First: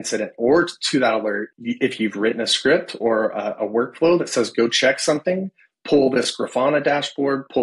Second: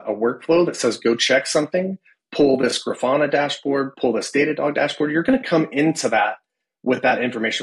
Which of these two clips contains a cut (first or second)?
first